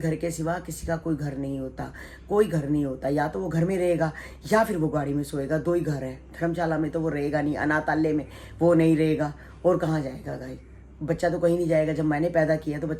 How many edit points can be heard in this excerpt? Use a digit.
0